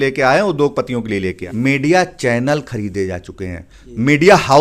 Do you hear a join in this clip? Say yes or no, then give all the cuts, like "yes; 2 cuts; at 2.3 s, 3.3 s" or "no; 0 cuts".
yes; 1 cut; at 1.4 s